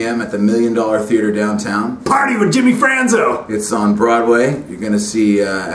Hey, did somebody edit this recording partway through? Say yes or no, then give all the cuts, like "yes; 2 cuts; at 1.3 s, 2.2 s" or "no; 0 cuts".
no; 0 cuts